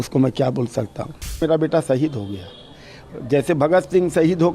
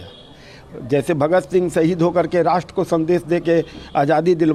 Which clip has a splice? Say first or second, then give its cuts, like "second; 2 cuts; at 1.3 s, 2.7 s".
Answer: first; 1 cut; at 1.4 s